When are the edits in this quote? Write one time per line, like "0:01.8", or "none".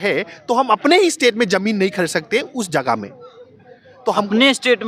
none

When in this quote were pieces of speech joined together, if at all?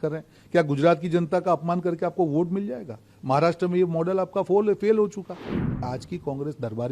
0:05.8

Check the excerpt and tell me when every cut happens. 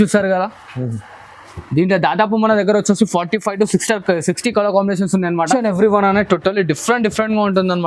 0:05.4

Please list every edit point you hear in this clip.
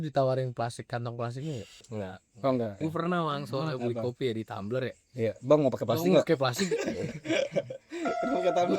0:01.8
0:02.8

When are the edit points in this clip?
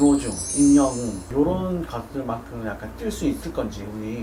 none

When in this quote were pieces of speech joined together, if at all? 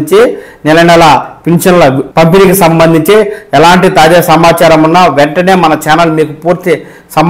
0:02.0

